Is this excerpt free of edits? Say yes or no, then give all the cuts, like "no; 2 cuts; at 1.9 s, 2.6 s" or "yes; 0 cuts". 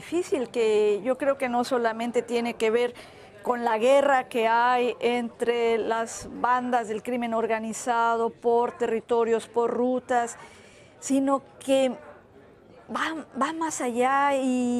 no; 1 cut; at 11.4 s